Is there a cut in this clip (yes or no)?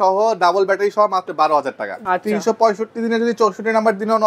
yes